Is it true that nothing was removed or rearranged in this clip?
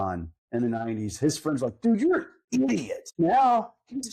no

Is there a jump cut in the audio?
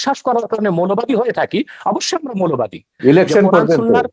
yes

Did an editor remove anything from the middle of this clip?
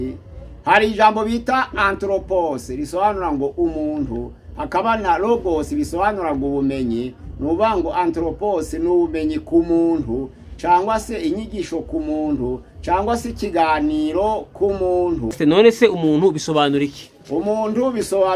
yes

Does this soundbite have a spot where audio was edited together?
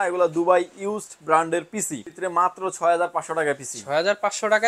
yes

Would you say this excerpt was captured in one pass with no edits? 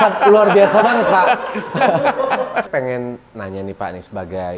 no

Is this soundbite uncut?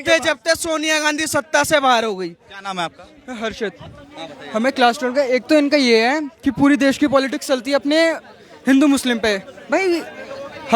yes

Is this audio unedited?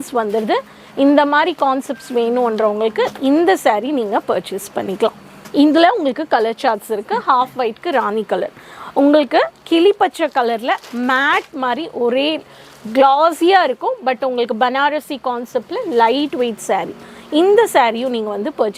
yes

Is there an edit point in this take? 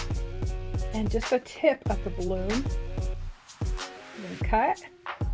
yes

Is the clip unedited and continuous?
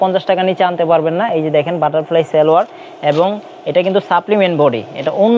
yes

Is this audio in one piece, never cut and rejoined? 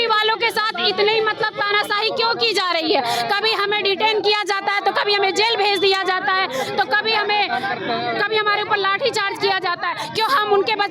yes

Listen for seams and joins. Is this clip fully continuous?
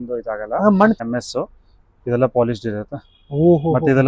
no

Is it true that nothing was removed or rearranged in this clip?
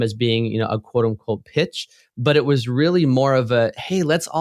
yes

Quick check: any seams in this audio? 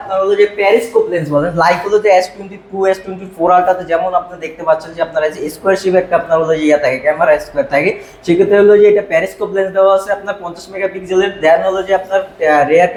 no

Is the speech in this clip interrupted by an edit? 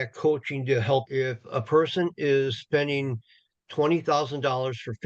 yes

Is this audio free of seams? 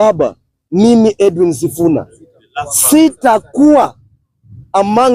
yes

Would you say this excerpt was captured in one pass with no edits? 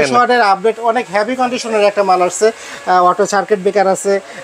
yes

